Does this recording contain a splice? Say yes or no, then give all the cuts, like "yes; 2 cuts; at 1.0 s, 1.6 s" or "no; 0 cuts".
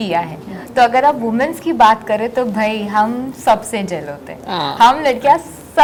no; 0 cuts